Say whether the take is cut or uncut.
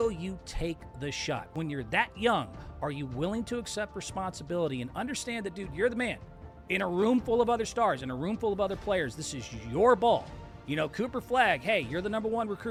uncut